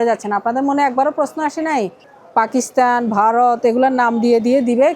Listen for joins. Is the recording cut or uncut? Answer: cut